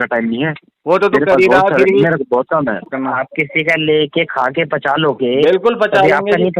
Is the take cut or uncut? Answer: cut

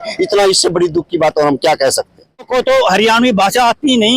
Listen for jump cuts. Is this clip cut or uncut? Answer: cut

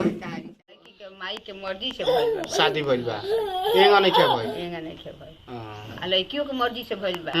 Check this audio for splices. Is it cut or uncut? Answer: cut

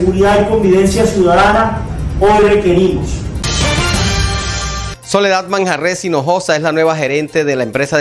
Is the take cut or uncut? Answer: cut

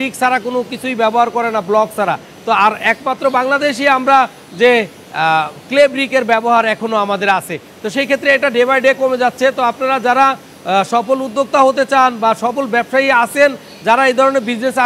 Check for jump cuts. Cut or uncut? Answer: uncut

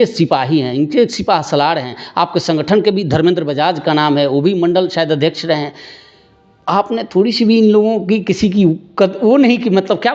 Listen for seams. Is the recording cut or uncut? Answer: uncut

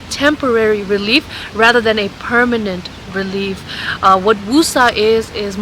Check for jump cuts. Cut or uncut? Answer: uncut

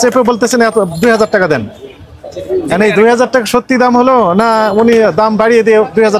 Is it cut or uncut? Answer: uncut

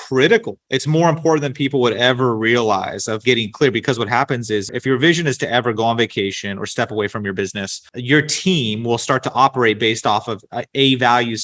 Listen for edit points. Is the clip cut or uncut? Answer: cut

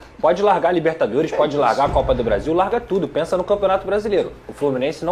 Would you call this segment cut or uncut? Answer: uncut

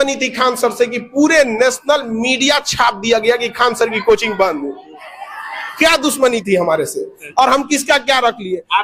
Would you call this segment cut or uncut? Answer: uncut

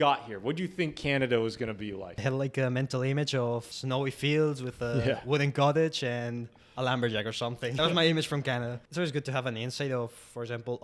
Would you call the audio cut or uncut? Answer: cut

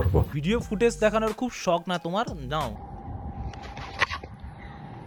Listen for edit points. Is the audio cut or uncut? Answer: uncut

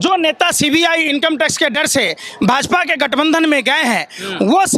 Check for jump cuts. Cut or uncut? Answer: uncut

